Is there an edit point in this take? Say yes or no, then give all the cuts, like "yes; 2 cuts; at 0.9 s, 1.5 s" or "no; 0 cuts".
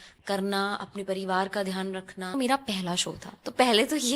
yes; 1 cut; at 2.4 s